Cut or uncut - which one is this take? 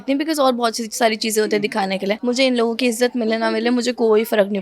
cut